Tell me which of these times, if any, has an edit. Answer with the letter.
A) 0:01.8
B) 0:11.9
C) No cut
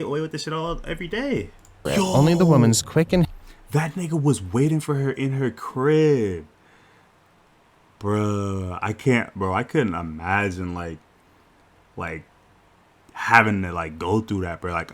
A